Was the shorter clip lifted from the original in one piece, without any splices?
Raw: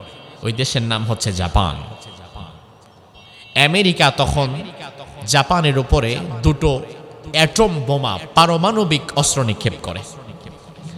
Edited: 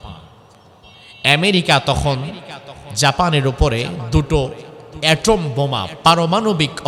yes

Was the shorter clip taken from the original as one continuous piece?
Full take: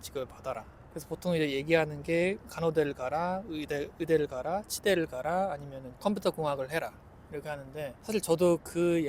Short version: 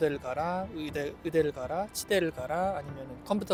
yes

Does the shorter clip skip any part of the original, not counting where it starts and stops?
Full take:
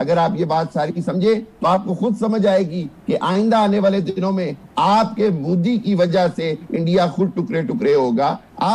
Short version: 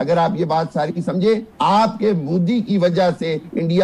yes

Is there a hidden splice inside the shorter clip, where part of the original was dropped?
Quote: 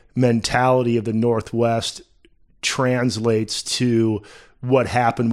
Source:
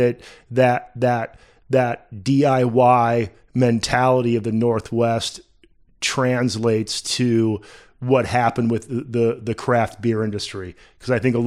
no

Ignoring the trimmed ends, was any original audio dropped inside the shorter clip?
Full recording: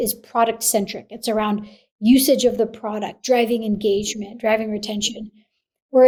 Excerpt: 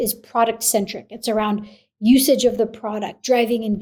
no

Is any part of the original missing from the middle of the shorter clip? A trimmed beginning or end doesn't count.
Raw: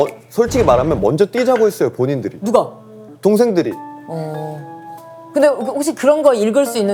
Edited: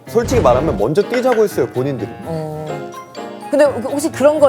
yes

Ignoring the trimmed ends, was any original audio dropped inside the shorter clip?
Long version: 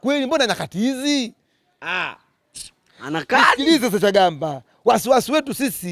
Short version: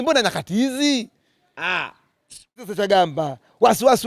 yes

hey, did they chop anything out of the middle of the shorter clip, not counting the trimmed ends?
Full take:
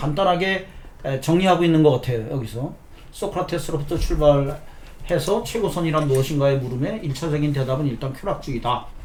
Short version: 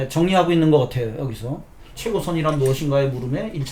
yes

